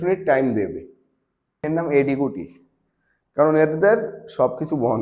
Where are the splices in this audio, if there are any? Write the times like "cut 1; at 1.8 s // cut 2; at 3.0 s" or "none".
cut 1; at 1.6 s